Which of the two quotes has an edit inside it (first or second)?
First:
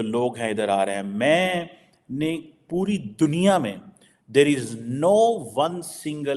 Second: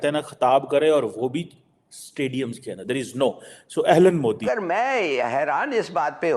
second